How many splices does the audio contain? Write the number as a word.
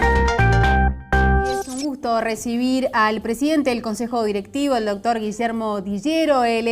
one